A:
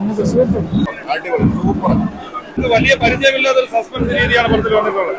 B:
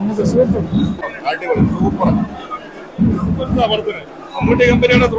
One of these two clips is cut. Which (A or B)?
A